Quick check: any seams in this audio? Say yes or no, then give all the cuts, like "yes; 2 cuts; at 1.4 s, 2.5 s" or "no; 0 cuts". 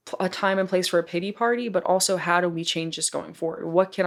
no; 0 cuts